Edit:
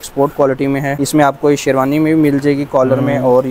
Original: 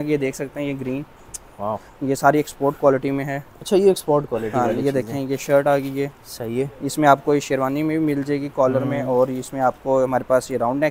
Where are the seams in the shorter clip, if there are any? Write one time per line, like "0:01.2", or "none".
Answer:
0:01.0